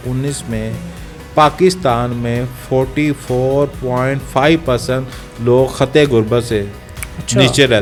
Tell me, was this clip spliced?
no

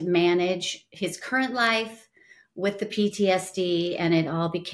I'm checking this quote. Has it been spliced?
no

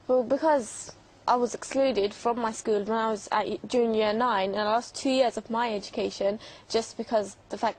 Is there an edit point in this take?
yes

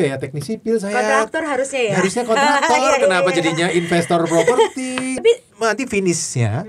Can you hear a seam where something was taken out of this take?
yes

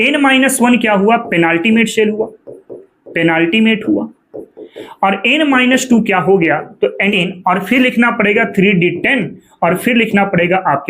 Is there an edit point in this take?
yes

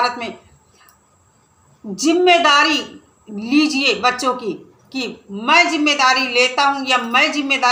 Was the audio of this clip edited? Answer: no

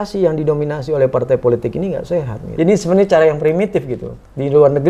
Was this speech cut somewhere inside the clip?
yes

